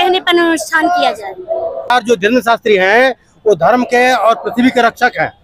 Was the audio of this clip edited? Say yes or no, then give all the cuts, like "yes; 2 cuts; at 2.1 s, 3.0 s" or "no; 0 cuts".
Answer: yes; 1 cut; at 1.9 s